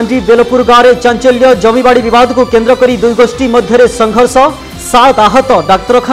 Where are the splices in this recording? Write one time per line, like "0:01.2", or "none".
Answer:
none